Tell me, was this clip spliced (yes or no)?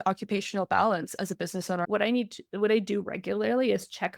yes